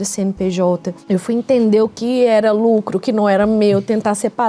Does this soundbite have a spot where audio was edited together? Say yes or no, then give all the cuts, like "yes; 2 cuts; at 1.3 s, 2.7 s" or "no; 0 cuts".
yes; 1 cut; at 0.9 s